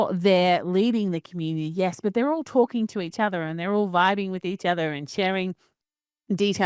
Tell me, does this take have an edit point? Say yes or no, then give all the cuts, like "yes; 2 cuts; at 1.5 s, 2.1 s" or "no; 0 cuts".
no; 0 cuts